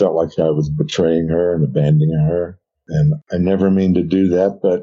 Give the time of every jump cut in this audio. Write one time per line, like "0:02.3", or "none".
0:03.1